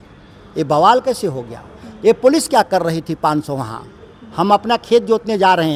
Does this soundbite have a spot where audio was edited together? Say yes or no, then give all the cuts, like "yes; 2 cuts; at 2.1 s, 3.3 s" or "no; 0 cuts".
no; 0 cuts